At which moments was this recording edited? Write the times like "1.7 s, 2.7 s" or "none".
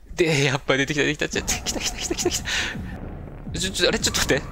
3.0 s